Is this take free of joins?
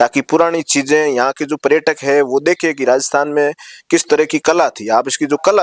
yes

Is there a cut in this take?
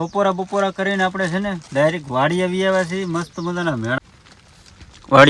yes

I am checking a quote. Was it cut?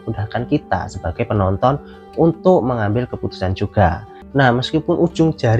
yes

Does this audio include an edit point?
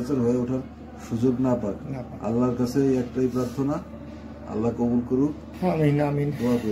yes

